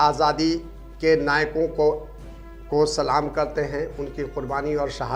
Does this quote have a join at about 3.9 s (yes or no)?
no